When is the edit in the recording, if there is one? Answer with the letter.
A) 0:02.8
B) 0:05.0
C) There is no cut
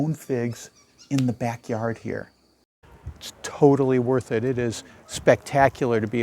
A